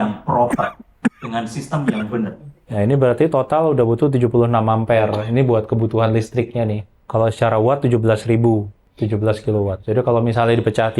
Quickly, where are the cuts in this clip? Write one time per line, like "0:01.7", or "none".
0:02.5
0:06.9
0:08.8
0:09.8